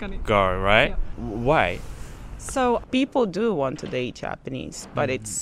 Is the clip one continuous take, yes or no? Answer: no